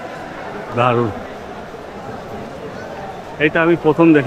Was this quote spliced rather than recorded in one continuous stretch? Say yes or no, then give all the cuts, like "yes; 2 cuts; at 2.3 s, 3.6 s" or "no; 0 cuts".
no; 0 cuts